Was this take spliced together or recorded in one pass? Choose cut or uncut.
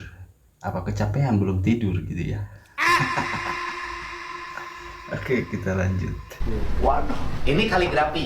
cut